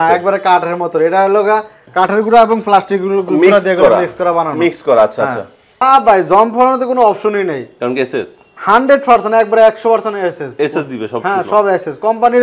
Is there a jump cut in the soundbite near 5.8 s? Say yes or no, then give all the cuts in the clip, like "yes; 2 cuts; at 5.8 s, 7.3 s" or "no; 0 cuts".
yes; 1 cut; at 5.8 s